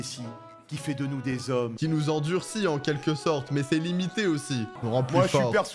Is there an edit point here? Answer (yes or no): no